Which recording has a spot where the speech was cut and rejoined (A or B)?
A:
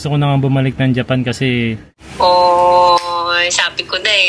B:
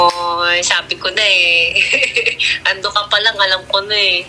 A